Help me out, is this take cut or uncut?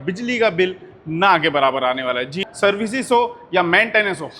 cut